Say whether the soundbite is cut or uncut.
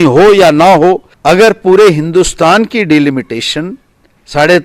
cut